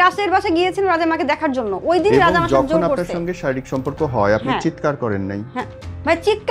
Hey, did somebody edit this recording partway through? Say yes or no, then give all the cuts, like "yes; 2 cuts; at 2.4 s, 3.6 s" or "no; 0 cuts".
no; 0 cuts